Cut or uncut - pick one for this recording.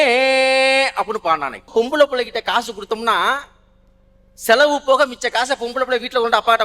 cut